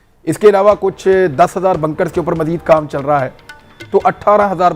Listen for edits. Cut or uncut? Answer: uncut